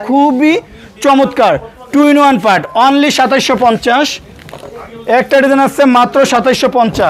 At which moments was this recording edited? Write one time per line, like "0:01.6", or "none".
none